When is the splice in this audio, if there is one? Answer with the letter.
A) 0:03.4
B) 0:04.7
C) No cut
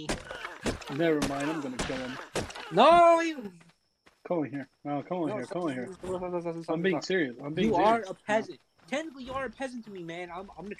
C